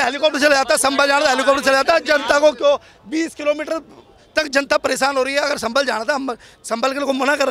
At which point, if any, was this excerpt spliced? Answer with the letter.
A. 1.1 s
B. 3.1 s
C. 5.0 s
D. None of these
D